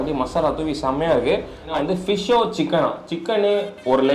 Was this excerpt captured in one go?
no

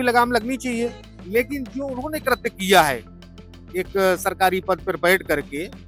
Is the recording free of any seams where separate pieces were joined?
yes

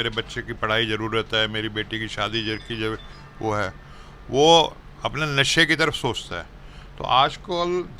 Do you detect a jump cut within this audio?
no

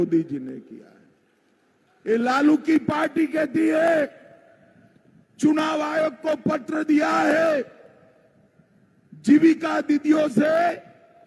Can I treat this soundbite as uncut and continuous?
yes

